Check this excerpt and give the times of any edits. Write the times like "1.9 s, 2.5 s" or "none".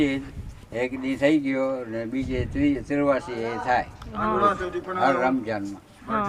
none